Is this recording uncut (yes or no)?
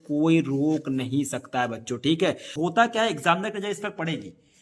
no